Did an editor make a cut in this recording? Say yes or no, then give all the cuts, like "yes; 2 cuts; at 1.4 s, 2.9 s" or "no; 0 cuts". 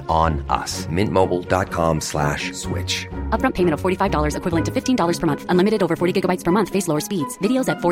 no; 0 cuts